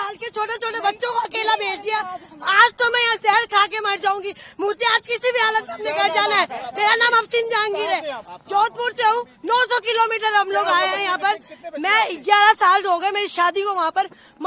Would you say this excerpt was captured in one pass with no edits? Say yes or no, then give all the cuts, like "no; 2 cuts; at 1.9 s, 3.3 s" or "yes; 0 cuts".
yes; 0 cuts